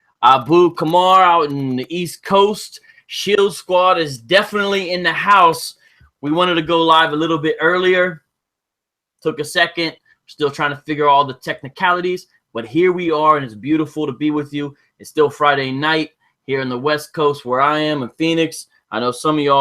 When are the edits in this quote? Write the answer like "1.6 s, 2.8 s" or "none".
1.5 s